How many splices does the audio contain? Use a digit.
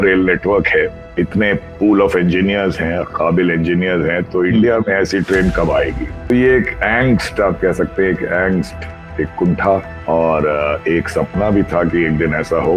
3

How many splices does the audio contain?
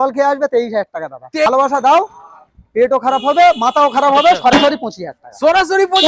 1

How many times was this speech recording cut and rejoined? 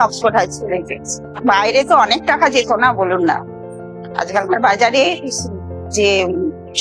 1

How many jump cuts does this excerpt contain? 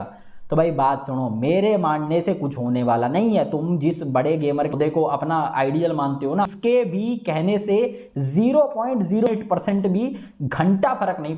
3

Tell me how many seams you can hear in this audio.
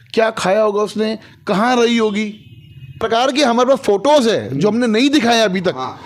1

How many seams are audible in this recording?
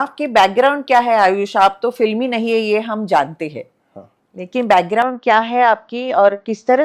0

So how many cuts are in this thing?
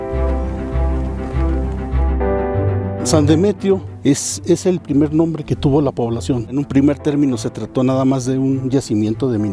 2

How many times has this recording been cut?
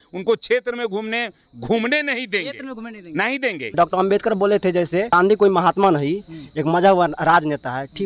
2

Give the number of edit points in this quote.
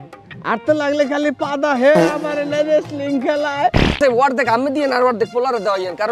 1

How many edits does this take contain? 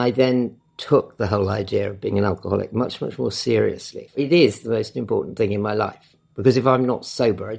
1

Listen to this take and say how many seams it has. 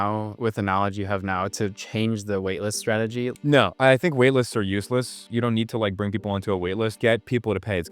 3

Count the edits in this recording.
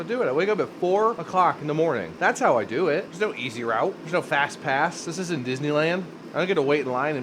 5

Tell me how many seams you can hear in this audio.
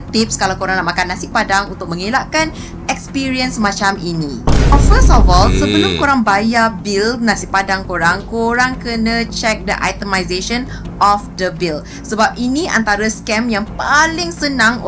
0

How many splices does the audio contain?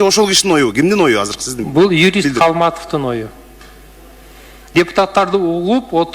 0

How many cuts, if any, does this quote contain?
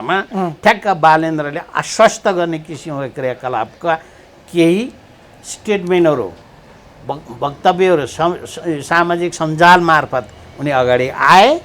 0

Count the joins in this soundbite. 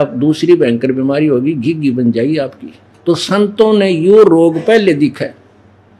1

